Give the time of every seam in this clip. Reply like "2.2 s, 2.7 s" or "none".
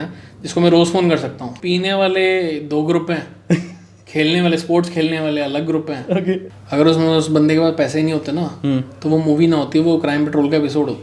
1.5 s, 6.5 s

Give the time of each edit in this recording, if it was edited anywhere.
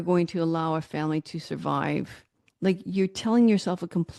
none

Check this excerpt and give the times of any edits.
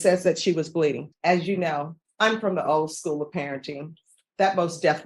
1.1 s, 2.0 s

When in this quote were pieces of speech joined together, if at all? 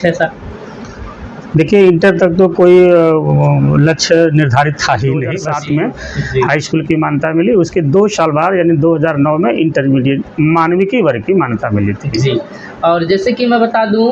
5.4 s

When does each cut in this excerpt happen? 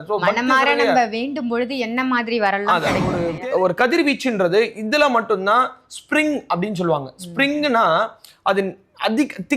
3.2 s

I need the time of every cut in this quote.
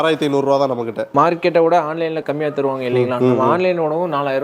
1.0 s, 2.2 s

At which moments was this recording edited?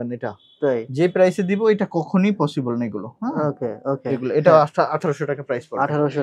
none

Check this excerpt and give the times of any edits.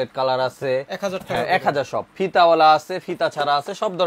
none

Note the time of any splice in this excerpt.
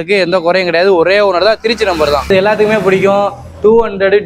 2.3 s

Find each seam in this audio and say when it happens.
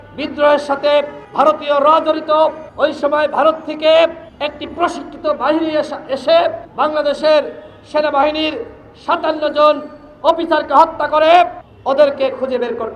1.2 s, 2.6 s, 4.2 s, 6.6 s, 11.7 s

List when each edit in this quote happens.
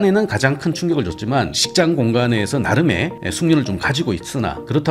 1.6 s

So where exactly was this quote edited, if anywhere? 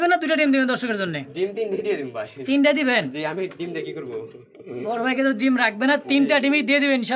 none

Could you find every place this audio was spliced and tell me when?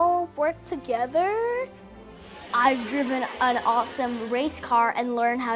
2.1 s

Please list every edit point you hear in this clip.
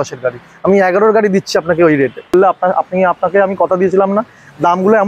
2.3 s

